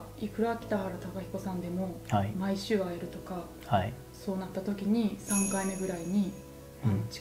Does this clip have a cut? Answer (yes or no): no